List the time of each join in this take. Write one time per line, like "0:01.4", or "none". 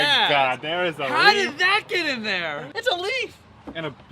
0:02.7

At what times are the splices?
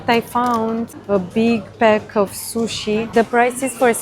0:00.9
0:03.1

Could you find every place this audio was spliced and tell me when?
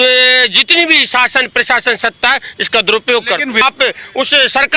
0:03.6

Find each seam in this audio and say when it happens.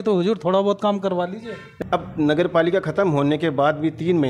0:01.6

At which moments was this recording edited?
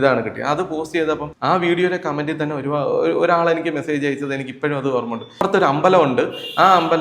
0:01.3
0:05.4

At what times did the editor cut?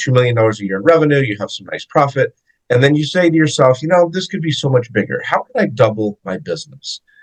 none

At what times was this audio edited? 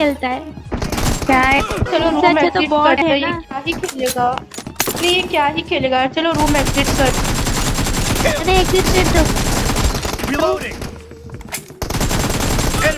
none

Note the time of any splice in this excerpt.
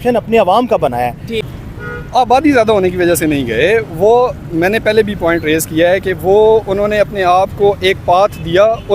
0:01.4

